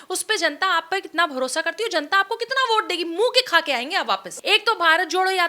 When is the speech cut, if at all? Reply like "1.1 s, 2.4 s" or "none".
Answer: 4.3 s